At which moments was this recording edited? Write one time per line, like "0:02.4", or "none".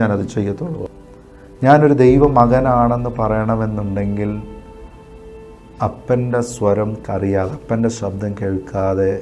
0:00.9